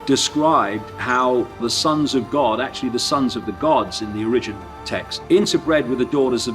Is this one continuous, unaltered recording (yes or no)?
no